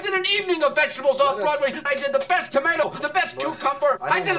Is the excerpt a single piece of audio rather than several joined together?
yes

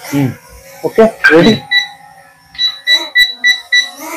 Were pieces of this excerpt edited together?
no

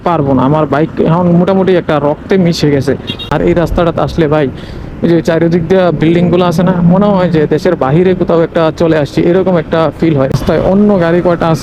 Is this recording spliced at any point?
yes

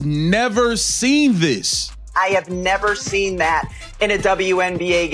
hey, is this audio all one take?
no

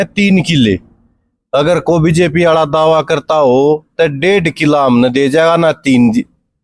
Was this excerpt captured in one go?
yes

